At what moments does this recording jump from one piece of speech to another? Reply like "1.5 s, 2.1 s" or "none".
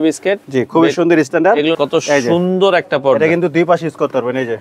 1.8 s